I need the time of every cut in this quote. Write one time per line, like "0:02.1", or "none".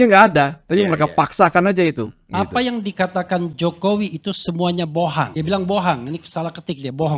0:02.2